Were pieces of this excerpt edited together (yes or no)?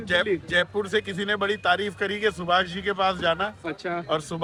no